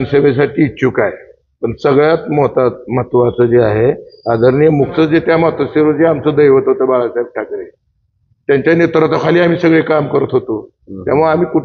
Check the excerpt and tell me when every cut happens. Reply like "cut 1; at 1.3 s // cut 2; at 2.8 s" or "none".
cut 1; at 4.9 s